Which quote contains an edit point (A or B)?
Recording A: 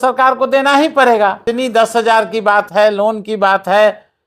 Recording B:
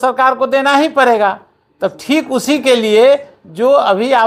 A